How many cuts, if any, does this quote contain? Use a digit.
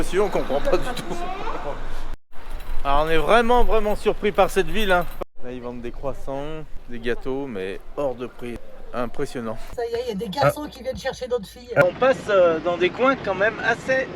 6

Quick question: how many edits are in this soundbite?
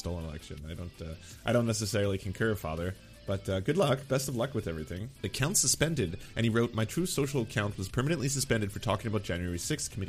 1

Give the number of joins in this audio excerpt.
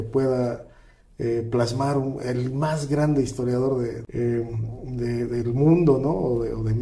1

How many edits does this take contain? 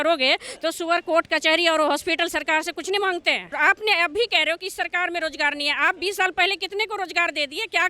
1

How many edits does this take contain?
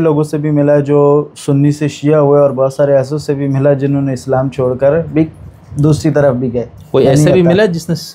0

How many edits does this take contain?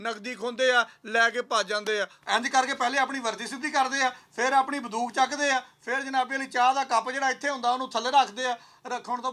1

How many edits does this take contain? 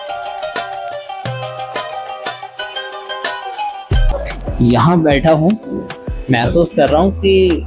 1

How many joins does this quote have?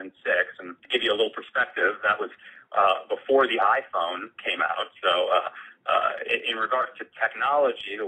1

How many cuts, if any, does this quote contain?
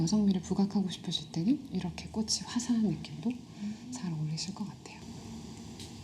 1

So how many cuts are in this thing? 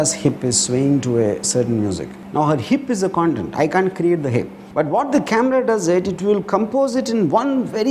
2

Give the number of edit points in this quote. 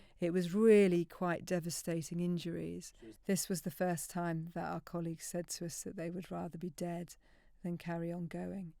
1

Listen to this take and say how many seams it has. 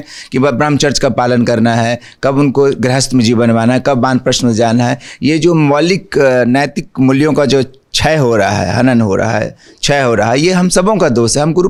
0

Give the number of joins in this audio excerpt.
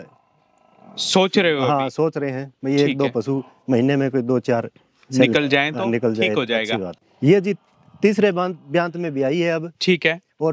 1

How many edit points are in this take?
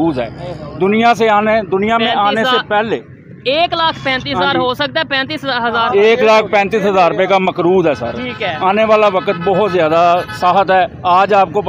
0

